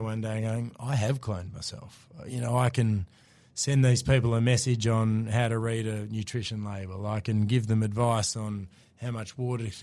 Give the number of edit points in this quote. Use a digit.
0